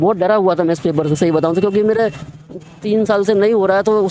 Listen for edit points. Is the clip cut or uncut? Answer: uncut